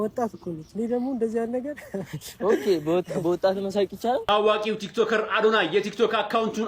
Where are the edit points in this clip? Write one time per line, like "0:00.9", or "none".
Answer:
0:04.2